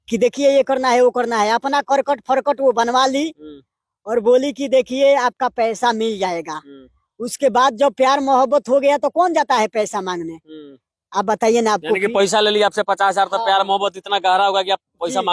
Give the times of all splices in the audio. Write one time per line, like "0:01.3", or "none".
none